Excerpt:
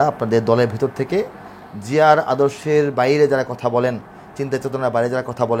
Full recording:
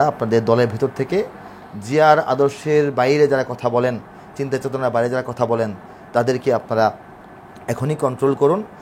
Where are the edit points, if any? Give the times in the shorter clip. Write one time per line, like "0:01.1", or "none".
none